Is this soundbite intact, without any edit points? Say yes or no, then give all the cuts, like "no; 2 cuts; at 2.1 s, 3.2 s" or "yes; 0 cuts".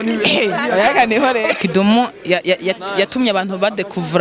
no; 1 cut; at 1.5 s